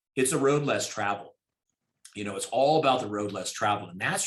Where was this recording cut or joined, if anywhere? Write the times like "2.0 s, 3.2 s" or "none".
none